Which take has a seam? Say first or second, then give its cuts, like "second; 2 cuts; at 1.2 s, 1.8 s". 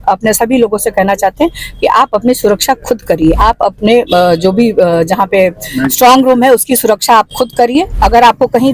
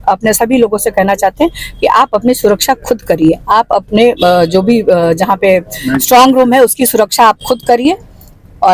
first; 2 cuts; at 3.4 s, 7.9 s